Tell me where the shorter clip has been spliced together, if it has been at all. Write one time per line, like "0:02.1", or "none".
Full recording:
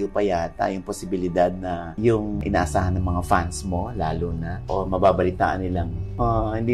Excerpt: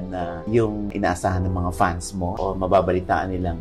0:02.3

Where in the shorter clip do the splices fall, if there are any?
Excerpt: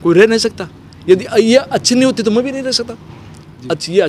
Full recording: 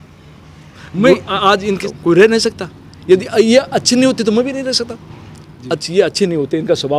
none

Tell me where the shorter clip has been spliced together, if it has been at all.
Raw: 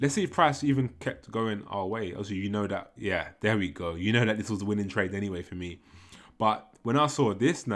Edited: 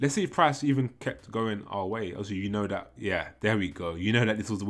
none

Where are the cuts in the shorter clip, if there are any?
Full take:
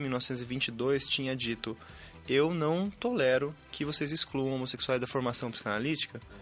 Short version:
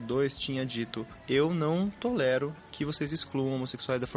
0:01.1

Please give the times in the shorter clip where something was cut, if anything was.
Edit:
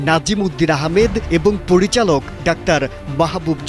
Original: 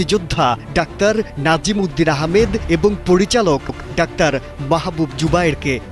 0:02.3

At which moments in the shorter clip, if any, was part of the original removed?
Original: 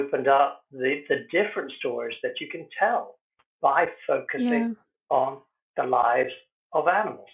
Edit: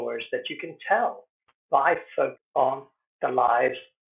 0:02.4

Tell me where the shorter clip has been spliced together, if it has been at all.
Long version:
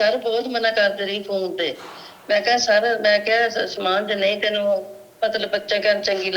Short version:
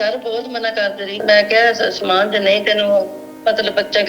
0:01.2

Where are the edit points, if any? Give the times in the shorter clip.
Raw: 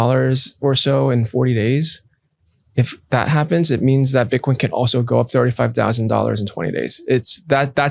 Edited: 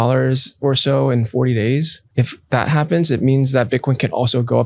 0:02.0

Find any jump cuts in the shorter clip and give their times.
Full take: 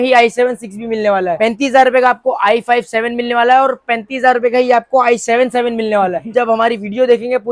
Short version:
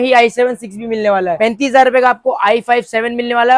none

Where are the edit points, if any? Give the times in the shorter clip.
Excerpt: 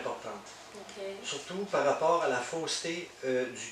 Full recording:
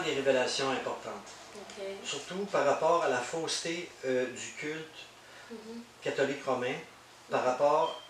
none

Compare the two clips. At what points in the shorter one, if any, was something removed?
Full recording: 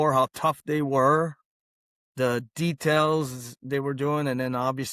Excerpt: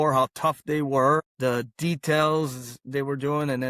0:01.2

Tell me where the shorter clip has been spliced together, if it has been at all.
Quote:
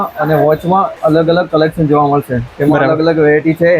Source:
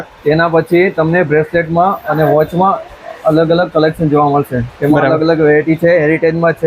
0:00.9

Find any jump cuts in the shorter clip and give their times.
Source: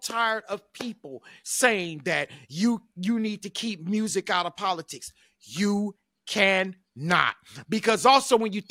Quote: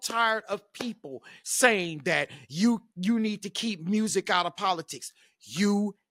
none

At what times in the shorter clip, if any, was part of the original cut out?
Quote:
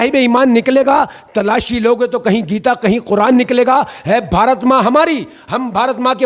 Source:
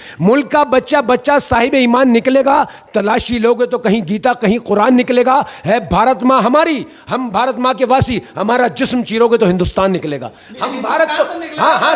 none

